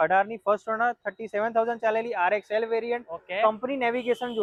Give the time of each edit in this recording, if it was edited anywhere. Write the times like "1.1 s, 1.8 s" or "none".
none